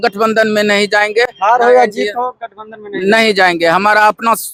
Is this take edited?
no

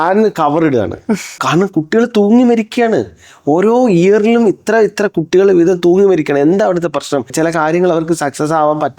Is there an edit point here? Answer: yes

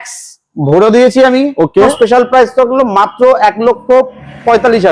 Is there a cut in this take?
yes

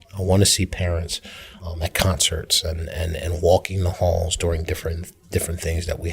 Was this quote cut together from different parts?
yes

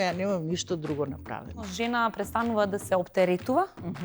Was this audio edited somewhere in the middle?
yes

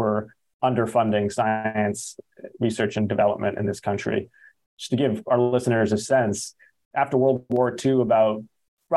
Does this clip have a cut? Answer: no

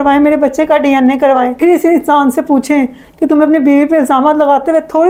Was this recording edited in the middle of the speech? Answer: no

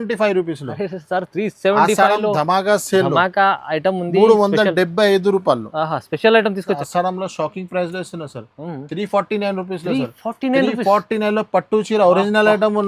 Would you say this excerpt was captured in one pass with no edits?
no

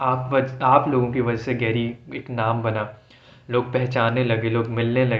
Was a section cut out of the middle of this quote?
no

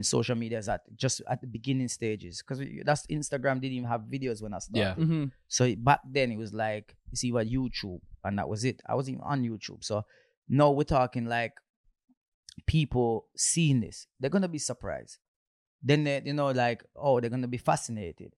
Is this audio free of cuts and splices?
yes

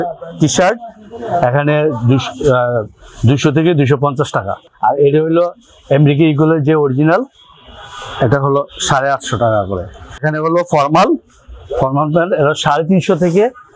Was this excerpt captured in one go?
no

